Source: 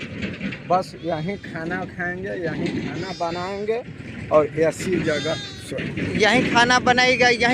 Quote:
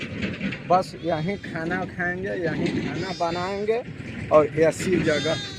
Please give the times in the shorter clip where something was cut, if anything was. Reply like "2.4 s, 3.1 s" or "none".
none